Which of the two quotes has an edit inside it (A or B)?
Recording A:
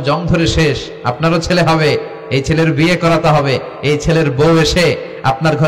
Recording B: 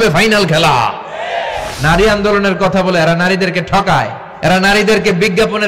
B